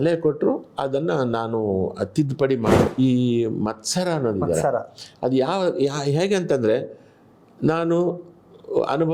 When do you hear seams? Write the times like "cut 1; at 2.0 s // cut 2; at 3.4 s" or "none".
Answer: cut 1; at 2.9 s